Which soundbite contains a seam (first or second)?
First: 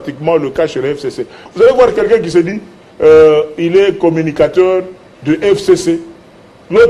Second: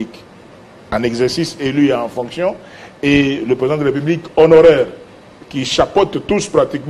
first